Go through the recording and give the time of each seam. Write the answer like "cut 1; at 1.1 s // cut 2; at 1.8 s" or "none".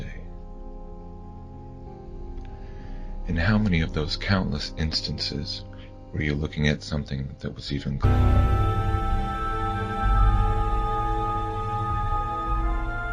none